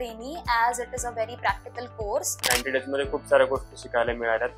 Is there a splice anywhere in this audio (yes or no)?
yes